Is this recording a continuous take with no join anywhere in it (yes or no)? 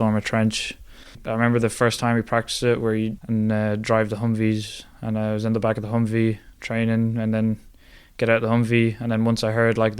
no